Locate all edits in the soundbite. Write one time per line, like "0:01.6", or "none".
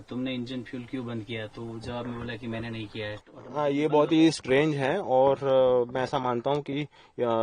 0:03.2